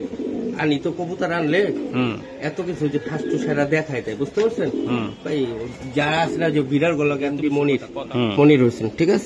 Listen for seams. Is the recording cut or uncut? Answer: cut